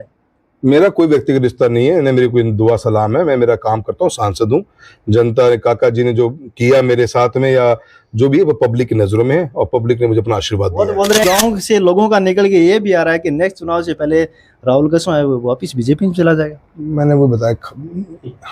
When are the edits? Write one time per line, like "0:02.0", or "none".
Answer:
0:11.2